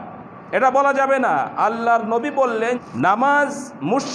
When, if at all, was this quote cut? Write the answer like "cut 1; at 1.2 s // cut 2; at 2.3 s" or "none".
cut 1; at 2.8 s